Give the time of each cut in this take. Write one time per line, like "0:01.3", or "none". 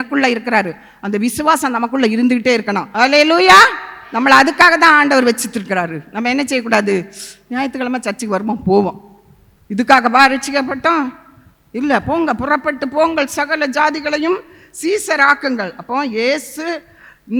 none